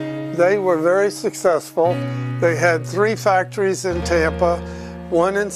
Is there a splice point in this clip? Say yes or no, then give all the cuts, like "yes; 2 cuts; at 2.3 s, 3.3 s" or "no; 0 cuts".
yes; 1 cut; at 0.9 s